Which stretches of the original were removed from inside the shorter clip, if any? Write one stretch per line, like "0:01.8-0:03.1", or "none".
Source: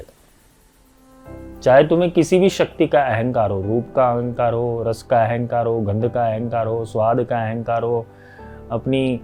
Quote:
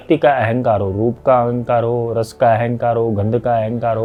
none

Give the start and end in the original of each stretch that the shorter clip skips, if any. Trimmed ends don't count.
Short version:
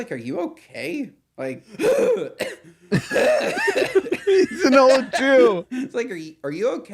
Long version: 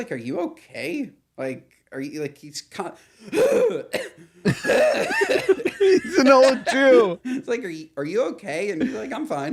0:01.7-0:03.2

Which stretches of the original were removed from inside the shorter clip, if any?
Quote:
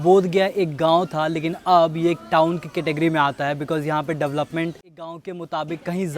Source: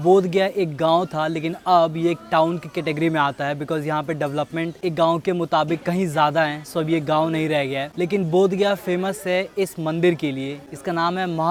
none

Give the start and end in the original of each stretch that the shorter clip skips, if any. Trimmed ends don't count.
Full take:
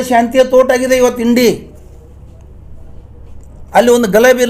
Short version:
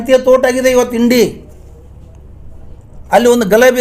0:03.1-0:03.5

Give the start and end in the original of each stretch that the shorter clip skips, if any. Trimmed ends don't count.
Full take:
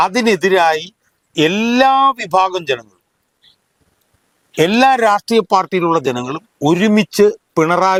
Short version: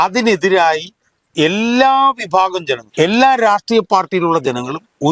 0:02.8-0:04.4

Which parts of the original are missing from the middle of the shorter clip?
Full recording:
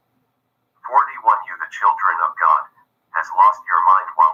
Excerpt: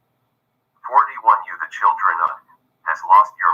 0:02.4-0:02.6

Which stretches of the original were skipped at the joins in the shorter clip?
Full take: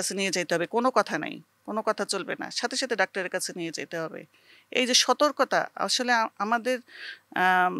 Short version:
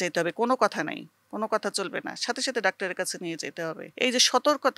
0:04.2-0:04.6

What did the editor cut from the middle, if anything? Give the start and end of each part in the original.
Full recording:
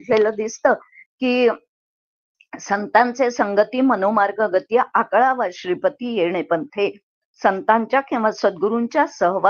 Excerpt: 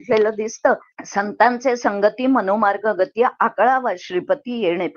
0:01.0-0:02.5

